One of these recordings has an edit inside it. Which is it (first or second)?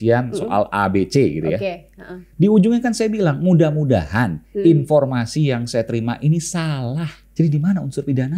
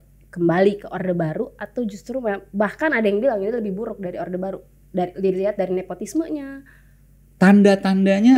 first